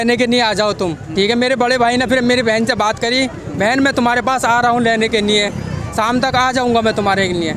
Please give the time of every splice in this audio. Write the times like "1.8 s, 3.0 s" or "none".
1.0 s